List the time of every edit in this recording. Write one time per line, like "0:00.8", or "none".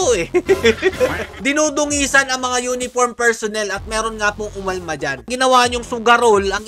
0:01.4
0:05.3